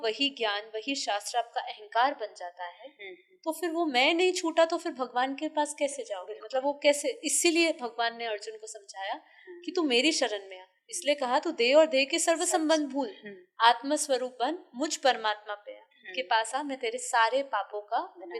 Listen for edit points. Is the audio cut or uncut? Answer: uncut